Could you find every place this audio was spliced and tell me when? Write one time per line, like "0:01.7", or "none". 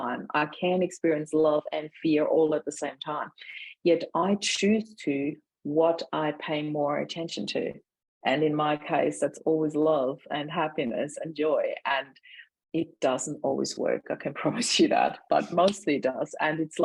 none